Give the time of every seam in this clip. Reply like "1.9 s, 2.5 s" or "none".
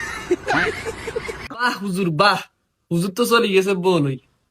1.6 s